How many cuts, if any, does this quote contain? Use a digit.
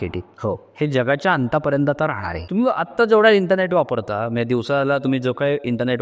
1